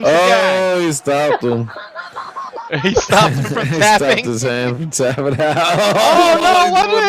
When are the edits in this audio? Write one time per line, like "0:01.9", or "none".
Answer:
none